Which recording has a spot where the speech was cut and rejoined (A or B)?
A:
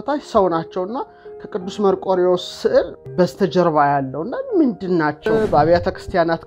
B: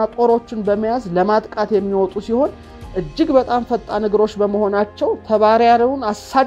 A